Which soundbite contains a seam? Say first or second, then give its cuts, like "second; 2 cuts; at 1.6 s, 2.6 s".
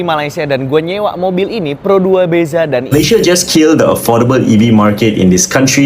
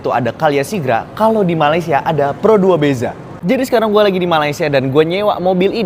first; 1 cut; at 2.9 s